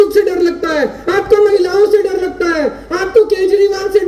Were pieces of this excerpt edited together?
no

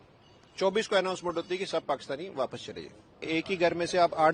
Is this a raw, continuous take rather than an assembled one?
no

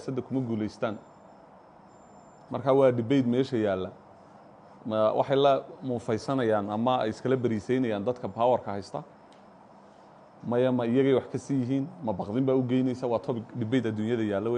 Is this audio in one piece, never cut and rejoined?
yes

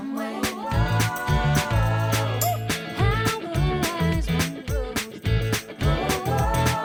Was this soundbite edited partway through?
no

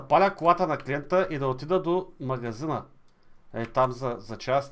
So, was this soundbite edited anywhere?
no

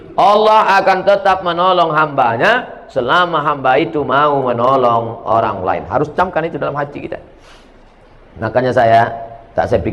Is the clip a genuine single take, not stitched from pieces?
yes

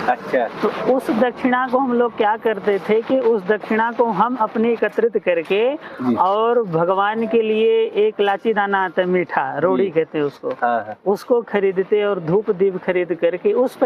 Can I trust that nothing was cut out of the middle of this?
yes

